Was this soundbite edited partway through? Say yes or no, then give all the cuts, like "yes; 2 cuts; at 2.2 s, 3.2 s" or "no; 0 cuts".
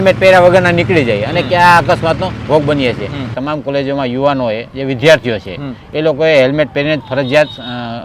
yes; 1 cut; at 3.3 s